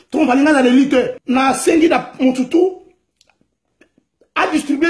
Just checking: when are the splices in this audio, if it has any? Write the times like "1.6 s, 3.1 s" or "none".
1.2 s